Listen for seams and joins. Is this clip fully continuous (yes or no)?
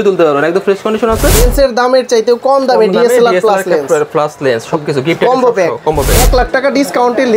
no